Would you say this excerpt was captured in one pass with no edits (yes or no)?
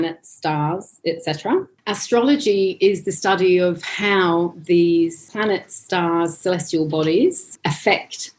no